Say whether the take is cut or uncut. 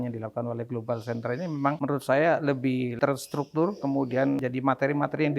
cut